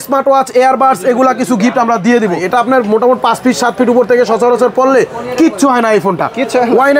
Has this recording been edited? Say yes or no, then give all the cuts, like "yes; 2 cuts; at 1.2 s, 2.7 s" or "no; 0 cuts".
yes; 1 cut; at 2.4 s